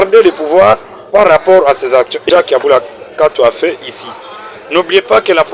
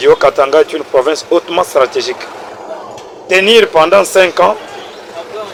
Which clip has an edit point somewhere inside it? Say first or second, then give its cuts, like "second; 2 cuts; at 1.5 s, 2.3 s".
first; 1 cut; at 2.2 s